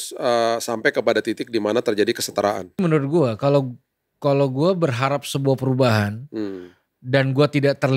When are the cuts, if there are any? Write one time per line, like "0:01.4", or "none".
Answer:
0:02.8

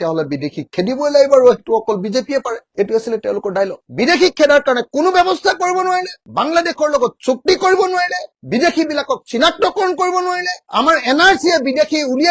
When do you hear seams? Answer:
0:03.8

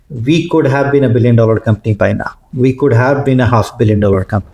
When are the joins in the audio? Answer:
none

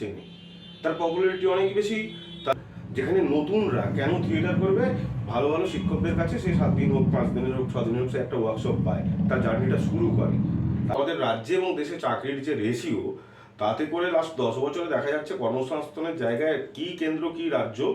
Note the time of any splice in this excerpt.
0:02.5
0:10.9

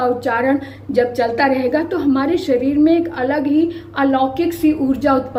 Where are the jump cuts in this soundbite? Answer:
none

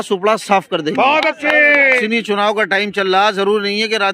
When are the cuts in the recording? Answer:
0:02.0

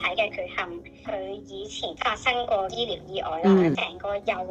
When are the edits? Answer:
0:00.9
0:03.8

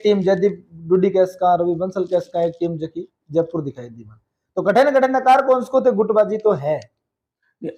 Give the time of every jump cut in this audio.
none

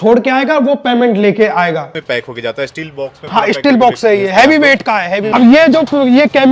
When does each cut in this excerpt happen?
0:01.9
0:05.3

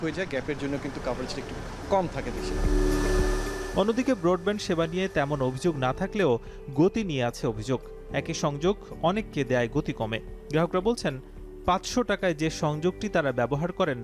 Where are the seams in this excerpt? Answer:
none

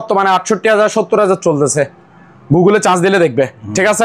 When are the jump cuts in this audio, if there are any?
none

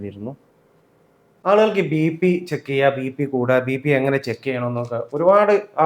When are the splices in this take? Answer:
0:01.3

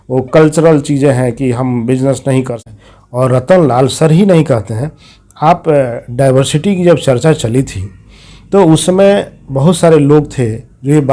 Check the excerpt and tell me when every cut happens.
0:02.7

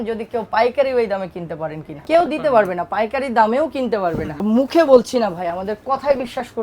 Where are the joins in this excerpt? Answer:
0:01.9
0:04.3

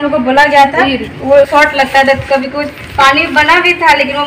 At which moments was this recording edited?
0:01.5

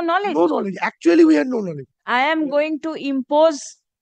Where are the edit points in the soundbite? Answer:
0:02.0

